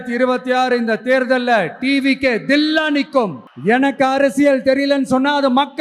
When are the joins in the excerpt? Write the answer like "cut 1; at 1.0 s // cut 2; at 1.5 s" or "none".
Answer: cut 1; at 3.5 s